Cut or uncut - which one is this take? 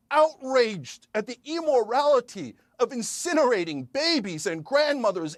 uncut